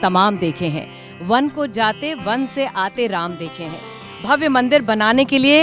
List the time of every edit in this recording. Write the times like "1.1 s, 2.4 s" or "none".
none